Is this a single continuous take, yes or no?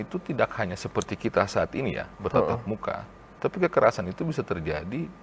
yes